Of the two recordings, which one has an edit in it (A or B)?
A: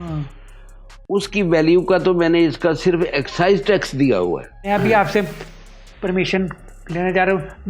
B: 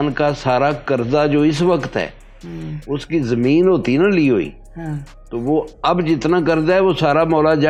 A